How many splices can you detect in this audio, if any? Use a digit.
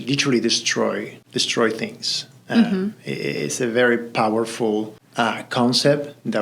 2